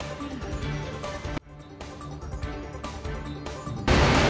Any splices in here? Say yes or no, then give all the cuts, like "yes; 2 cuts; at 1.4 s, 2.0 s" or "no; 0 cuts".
no; 0 cuts